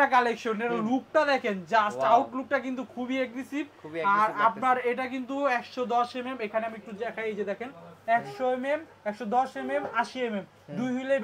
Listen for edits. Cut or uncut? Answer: uncut